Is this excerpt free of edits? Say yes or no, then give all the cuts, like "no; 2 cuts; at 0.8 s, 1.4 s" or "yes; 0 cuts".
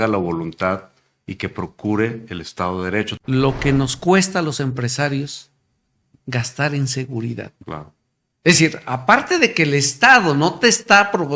no; 1 cut; at 3.2 s